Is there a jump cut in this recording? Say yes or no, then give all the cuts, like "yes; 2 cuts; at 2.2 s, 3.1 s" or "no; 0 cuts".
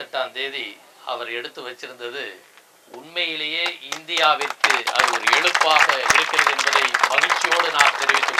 no; 0 cuts